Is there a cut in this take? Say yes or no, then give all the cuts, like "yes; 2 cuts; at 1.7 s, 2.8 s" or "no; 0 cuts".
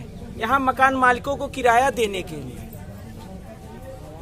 no; 0 cuts